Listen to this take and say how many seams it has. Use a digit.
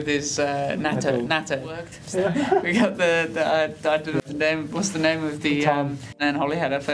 2